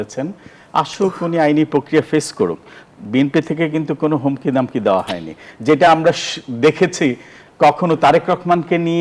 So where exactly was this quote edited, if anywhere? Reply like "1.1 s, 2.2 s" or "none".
none